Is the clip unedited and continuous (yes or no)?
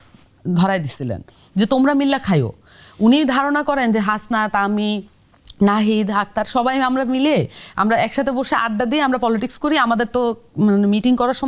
yes